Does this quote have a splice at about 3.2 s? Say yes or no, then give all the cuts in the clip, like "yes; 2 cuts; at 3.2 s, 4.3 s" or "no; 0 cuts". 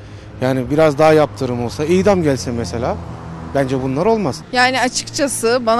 no; 1 cut; at 4.4 s